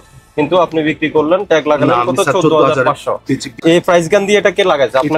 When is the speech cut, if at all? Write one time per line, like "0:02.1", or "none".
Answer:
0:03.5

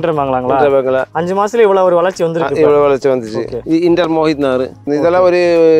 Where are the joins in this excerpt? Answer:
0:01.1
0:03.5
0:04.9

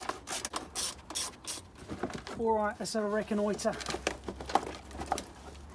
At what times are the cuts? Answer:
none

